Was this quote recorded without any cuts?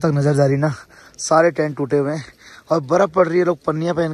yes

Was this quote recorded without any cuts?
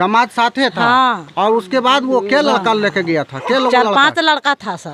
yes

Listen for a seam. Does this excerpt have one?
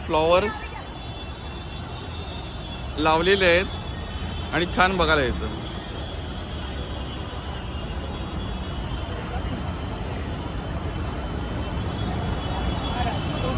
no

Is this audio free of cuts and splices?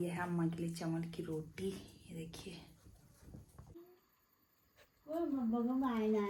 yes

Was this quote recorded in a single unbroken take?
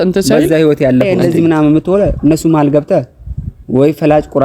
no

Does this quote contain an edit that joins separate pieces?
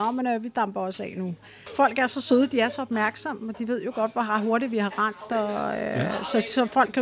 yes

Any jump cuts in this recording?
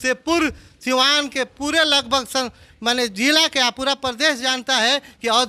no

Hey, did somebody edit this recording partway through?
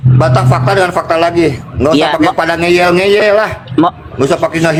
no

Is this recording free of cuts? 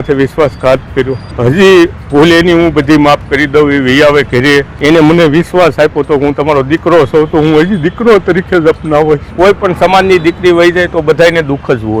no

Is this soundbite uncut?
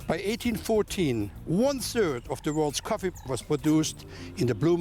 yes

